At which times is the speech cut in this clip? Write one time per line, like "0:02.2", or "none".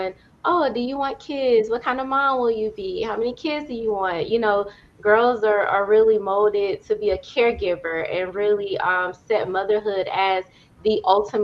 none